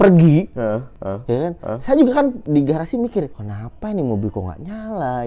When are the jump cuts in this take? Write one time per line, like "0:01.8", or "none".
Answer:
none